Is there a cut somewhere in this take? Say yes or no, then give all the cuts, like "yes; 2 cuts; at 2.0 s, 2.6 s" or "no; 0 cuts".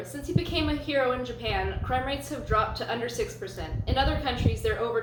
no; 0 cuts